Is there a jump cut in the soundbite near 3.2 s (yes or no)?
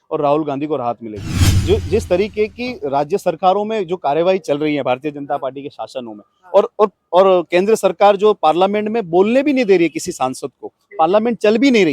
no